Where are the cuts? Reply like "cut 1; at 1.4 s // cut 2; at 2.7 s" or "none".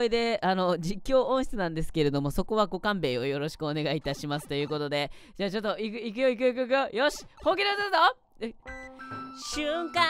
none